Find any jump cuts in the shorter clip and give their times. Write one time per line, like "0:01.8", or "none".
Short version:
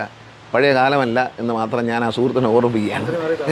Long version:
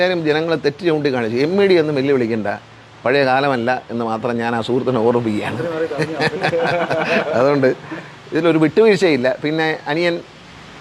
none